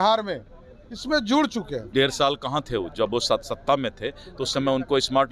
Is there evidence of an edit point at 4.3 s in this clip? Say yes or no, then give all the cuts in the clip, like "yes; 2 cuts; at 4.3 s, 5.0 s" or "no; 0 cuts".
no; 1 cut; at 1.8 s